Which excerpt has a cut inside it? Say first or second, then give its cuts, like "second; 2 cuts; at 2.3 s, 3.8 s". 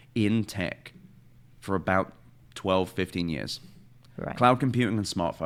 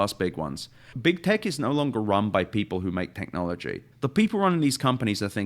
second; 2 cuts; at 0.9 s, 3.8 s